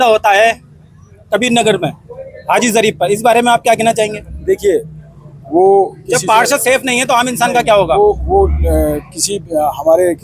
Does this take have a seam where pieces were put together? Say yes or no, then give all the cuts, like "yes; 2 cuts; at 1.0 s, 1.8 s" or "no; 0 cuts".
no; 0 cuts